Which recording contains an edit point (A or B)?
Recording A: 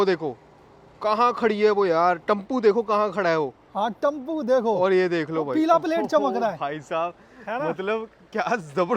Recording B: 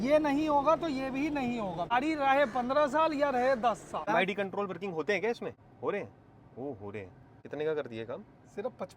B